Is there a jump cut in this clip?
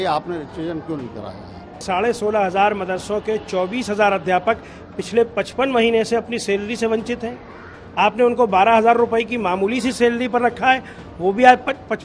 yes; 1 cut; at 1.8 s

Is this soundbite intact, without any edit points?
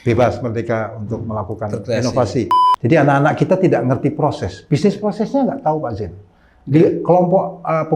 no; 1 cut; at 2.6 s

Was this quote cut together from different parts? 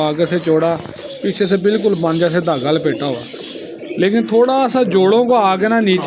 no; 0 cuts

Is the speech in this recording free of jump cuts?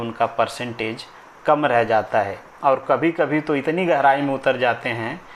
yes; 0 cuts

